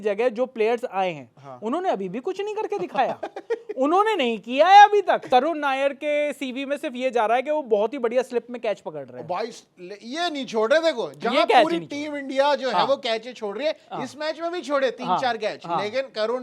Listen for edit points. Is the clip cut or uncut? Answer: cut